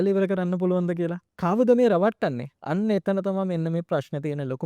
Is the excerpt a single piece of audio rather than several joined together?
no; 1 cut; at 1.3 s

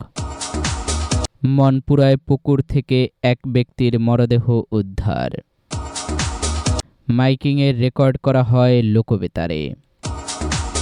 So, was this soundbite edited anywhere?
yes; 1 cut; at 9.9 s

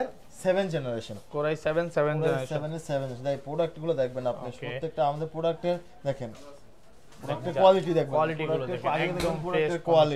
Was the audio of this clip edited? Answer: no; 0 cuts

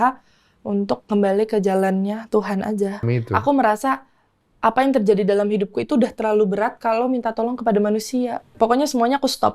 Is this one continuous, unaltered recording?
no; 2 cuts; at 3.0 s, 8.4 s

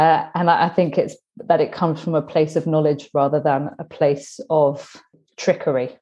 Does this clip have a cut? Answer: yes; 1 cut; at 5.1 s

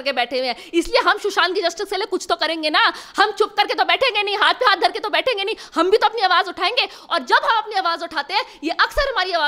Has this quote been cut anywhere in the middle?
no; 0 cuts

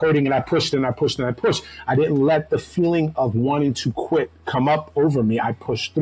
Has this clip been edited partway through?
no; 0 cuts

